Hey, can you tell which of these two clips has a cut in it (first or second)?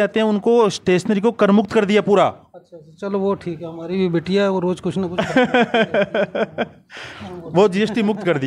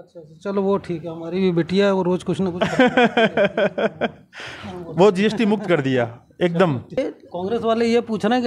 second